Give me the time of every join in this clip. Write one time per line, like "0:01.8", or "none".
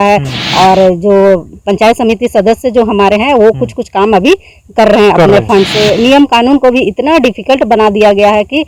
none